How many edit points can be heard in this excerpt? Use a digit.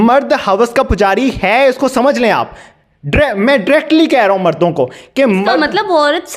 0